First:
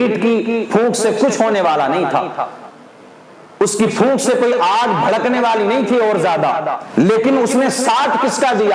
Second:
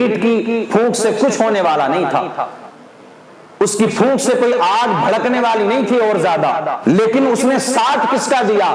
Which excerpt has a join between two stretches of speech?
second; 1 cut; at 6.7 s

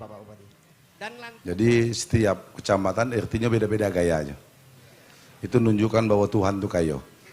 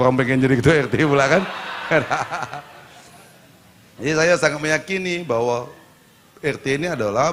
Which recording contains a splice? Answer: first; 1 cut; at 1.1 s

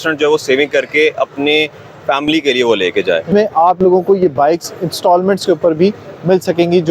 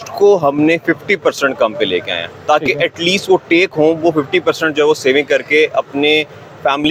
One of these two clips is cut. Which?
first; 1 cut; at 3.3 s

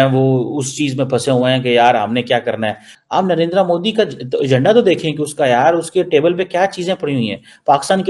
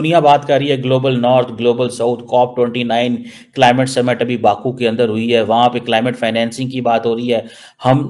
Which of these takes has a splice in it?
first; 1 cut; at 2.9 s

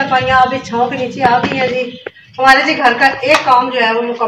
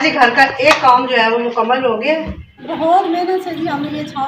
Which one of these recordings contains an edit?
second; 1 cut; at 2.6 s

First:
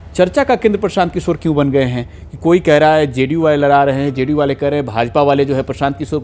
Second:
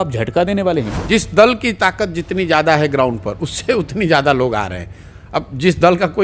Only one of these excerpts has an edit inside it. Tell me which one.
second; 1 cut; at 1.0 s

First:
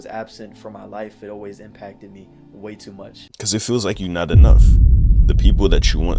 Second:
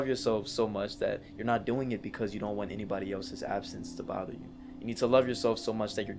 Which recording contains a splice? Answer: first; 1 cut; at 3.2 s

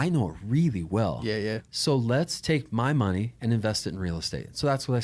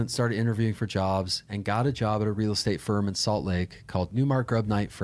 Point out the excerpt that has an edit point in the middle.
second; 1 cut; at 4.1 s

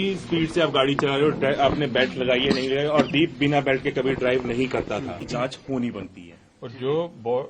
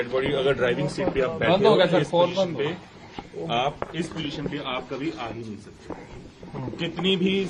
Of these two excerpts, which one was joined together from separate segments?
first; 1 cut; at 5.3 s

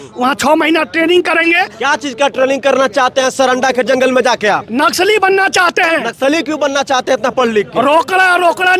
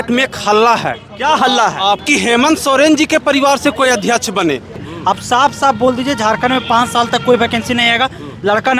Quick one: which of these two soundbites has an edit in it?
second; 2 cuts; at 2.0 s, 4.8 s

